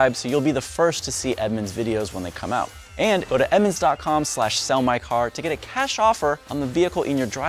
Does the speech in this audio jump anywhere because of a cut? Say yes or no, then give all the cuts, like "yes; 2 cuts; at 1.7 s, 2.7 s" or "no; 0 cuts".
yes; 2 cuts; at 3.2 s, 6.5 s